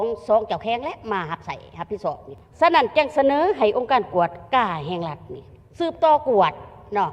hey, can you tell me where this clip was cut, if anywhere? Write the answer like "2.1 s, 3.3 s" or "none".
2.3 s